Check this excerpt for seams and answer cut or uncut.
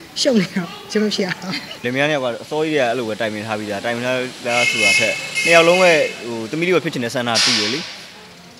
cut